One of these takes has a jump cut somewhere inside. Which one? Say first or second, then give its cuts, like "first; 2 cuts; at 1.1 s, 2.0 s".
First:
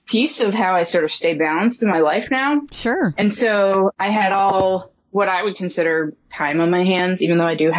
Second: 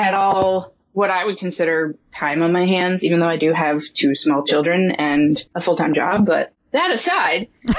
second; 1 cut; at 5.5 s